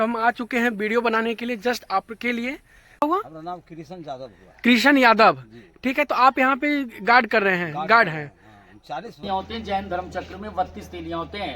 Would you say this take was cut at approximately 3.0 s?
yes; 2 cuts; at 3.0 s, 9.2 s

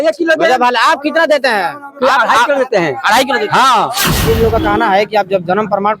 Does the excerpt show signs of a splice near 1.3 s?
no; 1 cut; at 4.2 s

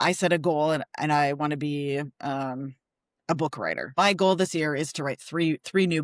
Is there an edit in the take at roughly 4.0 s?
yes; 1 cut; at 4.0 s

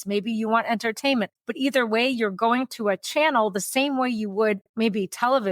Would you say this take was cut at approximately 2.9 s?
no; 1 cut; at 1.4 s

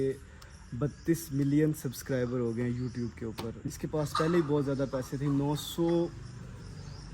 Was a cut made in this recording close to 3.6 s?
yes; 1 cut; at 3.6 s

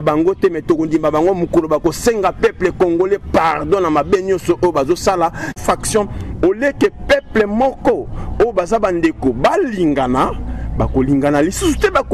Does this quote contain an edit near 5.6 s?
yes; 1 cut; at 5.6 s

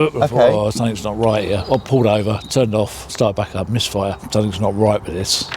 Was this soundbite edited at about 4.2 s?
yes; 2 cuts; at 3.0 s, 4.2 s

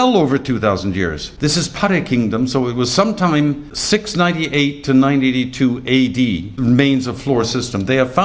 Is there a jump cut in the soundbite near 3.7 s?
yes; 3 cuts; at 1.2 s, 3.7 s, 6.5 s

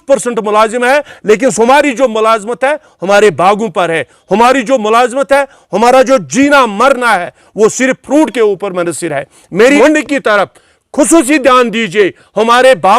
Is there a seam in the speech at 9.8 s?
yes; 1 cut; at 9.8 s

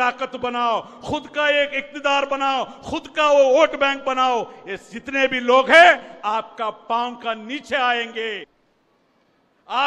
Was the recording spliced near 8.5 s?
yes; 1 cut; at 8.5 s

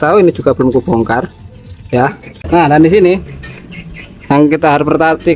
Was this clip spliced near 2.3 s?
yes; 1 cut; at 2.3 s

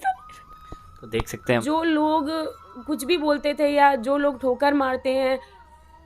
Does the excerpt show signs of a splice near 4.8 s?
no; 1 cut; at 1.6 s

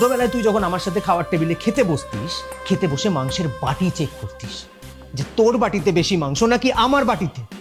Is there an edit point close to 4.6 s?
no; 0 cuts

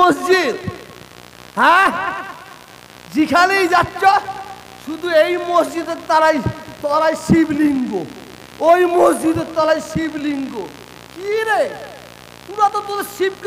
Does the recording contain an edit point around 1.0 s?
no; 0 cuts

